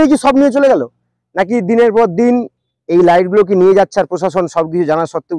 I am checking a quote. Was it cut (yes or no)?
no